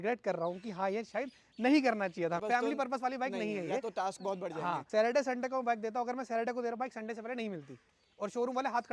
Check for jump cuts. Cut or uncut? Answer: cut